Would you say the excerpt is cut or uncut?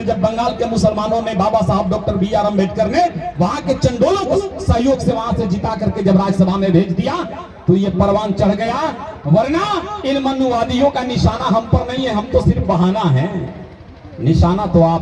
uncut